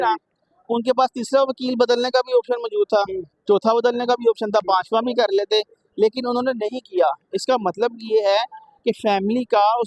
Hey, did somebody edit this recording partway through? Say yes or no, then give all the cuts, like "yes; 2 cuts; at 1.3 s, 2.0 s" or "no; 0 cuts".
no; 0 cuts